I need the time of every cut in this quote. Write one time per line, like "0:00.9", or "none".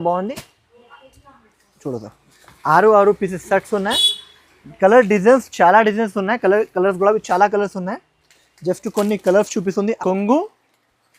0:10.0